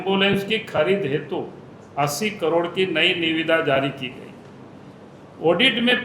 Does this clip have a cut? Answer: no; 0 cuts

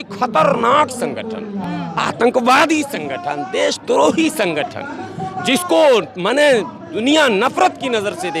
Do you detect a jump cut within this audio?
no; 0 cuts

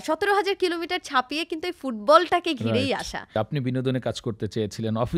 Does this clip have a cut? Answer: yes; 1 cut; at 3.3 s

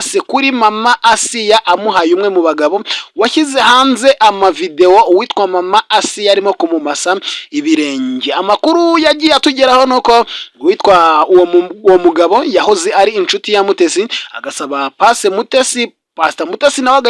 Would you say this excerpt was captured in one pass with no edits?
yes; 0 cuts

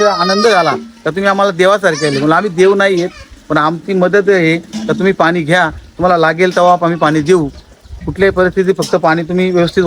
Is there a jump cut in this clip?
no; 0 cuts

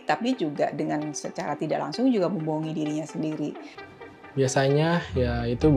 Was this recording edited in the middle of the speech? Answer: yes; 1 cut; at 4.1 s

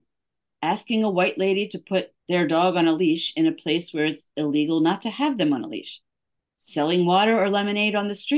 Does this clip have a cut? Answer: no; 0 cuts

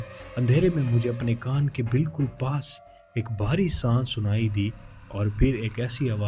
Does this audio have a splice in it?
no; 0 cuts

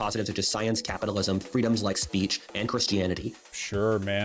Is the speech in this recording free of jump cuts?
no; 1 cut; at 3.4 s

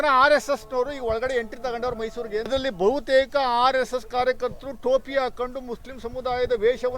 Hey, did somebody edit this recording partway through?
yes; 1 cut; at 2.5 s

